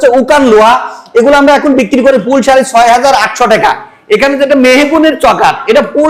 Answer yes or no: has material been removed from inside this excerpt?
no